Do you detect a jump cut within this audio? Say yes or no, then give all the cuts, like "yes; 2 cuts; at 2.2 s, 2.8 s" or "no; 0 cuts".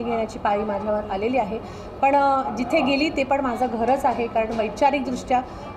no; 0 cuts